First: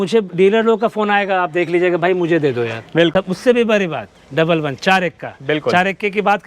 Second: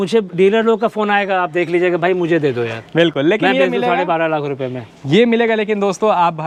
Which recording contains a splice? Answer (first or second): first